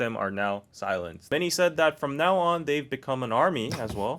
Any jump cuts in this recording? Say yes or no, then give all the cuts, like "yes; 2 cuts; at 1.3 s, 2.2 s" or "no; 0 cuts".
yes; 1 cut; at 1.3 s